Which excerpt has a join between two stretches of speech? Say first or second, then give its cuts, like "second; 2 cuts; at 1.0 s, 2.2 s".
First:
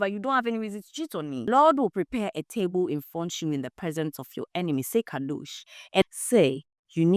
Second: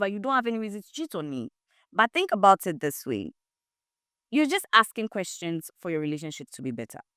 first; 2 cuts; at 1.5 s, 6.0 s